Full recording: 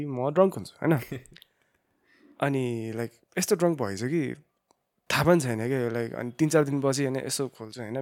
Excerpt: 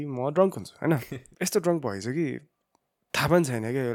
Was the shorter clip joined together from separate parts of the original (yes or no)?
yes